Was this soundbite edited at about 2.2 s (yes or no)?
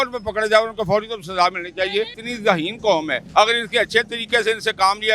yes